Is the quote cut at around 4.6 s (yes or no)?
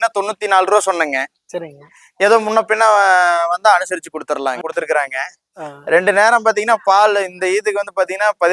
yes